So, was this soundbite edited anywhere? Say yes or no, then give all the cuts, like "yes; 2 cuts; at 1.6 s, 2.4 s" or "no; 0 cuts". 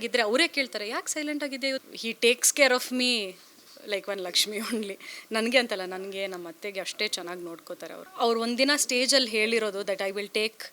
yes; 2 cuts; at 1.8 s, 8.0 s